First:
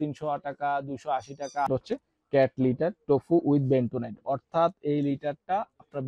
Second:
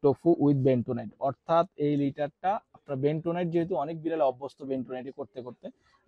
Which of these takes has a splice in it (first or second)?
first